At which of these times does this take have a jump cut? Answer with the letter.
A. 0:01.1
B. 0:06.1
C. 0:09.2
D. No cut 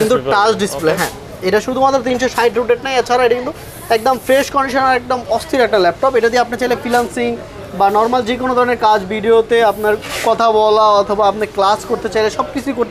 D